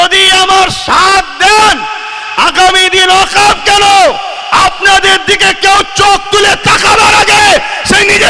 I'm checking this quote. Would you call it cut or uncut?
uncut